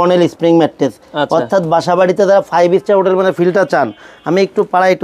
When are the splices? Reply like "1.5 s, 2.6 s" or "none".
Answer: none